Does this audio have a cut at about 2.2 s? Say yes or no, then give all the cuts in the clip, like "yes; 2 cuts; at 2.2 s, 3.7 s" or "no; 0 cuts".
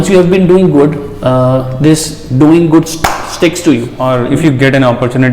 no; 1 cut; at 3.9 s